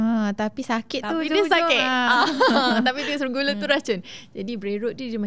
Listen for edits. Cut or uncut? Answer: uncut